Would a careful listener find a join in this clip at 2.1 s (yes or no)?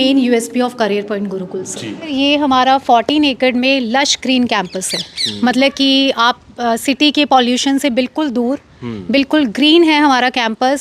yes